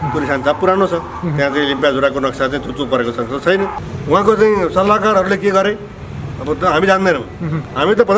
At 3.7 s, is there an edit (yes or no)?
yes